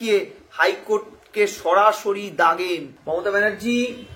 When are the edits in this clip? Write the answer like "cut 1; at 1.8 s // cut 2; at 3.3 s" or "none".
cut 1; at 2.9 s